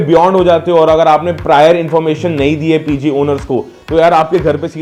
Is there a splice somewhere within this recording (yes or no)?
no